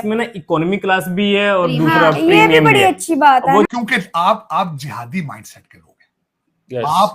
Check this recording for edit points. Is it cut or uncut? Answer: cut